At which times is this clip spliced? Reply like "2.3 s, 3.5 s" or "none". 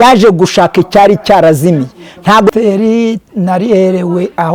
2.5 s